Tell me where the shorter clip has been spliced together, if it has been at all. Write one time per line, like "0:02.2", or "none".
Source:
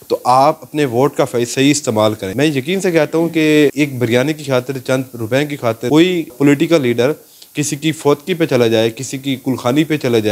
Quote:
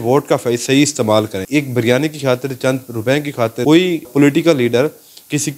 0:01.5